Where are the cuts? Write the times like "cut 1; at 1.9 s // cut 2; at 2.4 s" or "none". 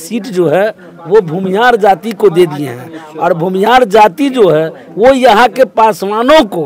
none